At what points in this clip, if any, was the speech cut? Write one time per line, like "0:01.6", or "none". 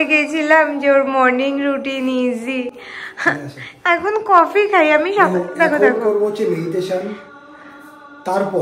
none